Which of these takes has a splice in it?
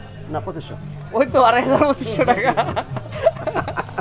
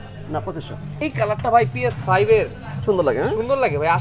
second; 1 cut; at 1.0 s

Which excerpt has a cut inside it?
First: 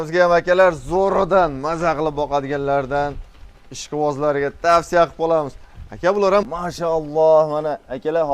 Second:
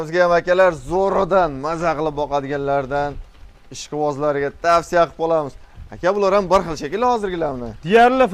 first; 1 cut; at 6.5 s

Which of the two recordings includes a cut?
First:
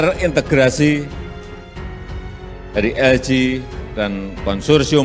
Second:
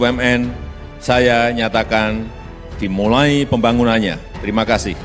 first; 2 cuts; at 1.1 s, 2.7 s

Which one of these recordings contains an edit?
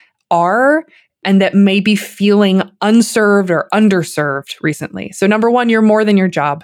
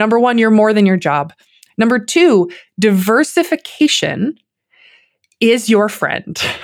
first; 2 cuts; at 1.2 s, 2.7 s

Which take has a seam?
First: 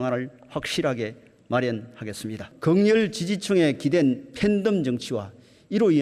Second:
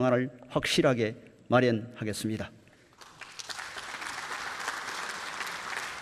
first; 1 cut; at 2.5 s

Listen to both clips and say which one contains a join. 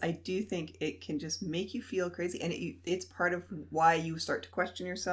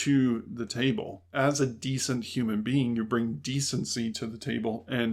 second; 1 cut; at 1.2 s

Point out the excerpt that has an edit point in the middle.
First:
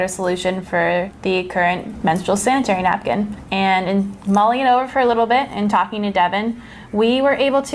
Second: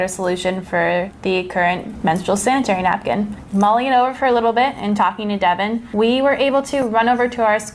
second; 2 cuts; at 3.4 s, 5.8 s

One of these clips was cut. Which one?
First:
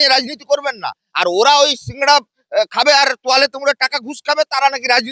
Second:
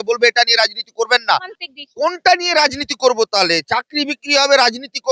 second; 1 cut; at 1.6 s

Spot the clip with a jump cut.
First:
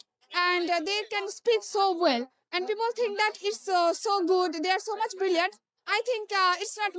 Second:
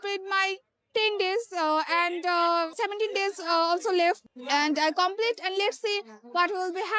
second; 2 cuts; at 2.7 s, 4.3 s

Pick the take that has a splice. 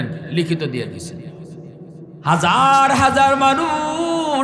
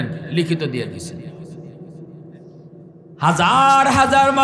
first; 1 cut; at 2.2 s

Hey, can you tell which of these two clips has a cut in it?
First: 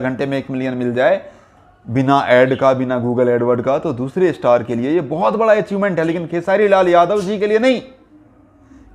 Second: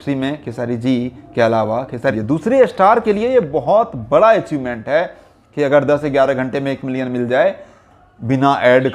second; 1 cut; at 2.1 s

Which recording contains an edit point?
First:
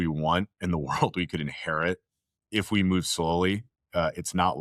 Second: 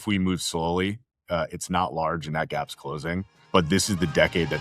second; 1 cut; at 3.3 s

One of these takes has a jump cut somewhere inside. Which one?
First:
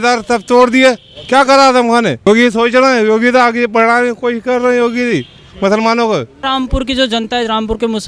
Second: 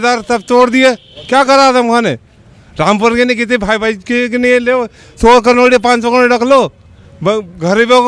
first; 2 cuts; at 2.3 s, 6.4 s

